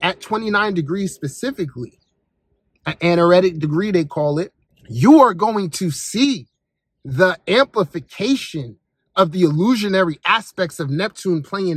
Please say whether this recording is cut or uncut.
uncut